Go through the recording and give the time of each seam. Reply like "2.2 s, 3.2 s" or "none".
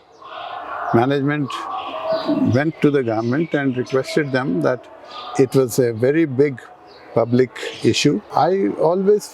8.3 s